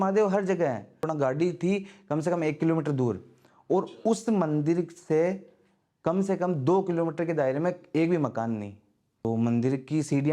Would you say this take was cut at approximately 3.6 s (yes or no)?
no